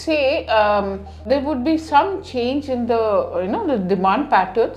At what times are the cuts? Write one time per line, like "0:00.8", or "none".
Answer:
0:01.2